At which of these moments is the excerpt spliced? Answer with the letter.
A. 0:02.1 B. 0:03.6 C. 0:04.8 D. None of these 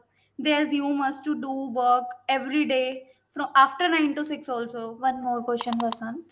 C